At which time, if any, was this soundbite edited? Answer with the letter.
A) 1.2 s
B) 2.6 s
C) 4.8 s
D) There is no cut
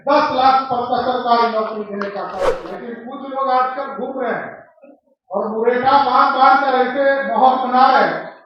B